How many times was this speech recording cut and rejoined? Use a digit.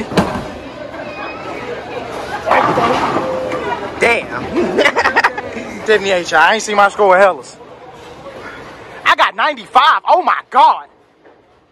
1